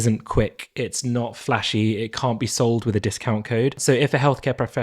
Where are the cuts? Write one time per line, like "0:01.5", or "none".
0:03.8